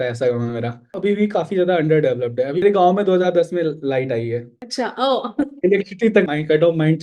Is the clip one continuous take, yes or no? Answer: no